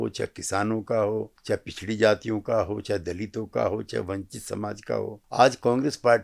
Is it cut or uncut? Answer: cut